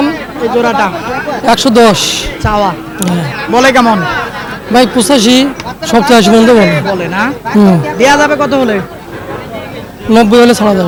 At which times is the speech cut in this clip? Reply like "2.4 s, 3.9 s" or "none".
none